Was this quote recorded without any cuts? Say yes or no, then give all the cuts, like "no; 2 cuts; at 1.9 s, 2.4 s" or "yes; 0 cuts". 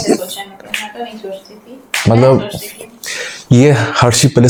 yes; 0 cuts